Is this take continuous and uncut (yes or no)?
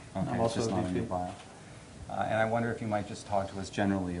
yes